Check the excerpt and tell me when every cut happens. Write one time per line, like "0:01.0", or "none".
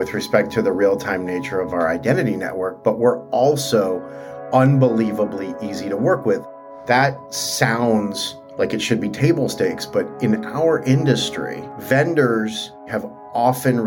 0:06.5
0:12.9